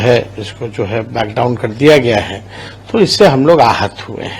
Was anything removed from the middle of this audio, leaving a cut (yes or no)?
no